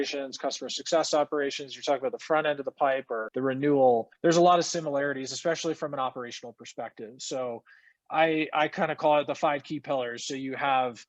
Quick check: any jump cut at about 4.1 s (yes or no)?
yes